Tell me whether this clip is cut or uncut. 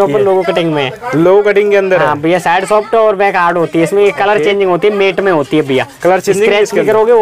uncut